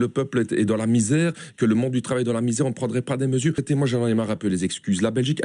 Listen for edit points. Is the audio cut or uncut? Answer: cut